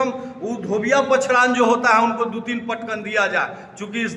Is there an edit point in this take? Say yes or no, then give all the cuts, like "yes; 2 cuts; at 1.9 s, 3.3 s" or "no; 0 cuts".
no; 0 cuts